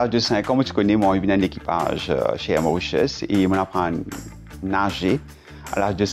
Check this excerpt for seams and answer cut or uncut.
uncut